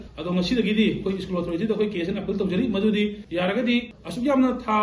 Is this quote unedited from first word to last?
yes; 0 cuts

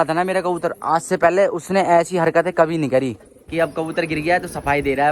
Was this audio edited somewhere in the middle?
yes; 1 cut; at 3.4 s

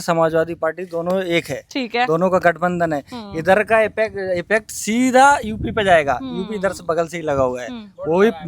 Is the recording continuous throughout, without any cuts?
yes; 0 cuts

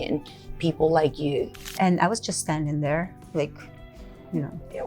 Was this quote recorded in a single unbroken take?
no; 1 cut; at 1.6 s

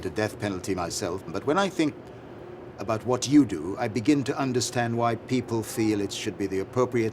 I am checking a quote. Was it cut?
yes; 1 cut; at 1.3 s

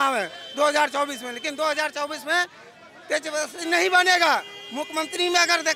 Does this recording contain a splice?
no; 0 cuts

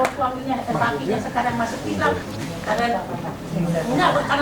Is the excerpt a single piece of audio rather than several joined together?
no; 1 cut; at 2.3 s

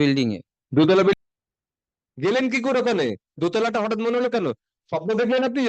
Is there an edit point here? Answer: yes; 1 cut; at 1.1 s

